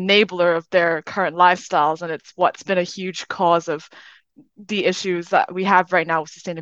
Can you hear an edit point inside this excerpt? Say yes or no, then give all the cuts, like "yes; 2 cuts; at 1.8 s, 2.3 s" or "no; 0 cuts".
no; 0 cuts